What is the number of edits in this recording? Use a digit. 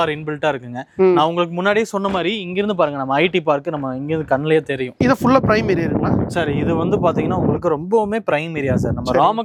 0